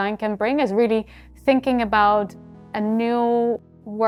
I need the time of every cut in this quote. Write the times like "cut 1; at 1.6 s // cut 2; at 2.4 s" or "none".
none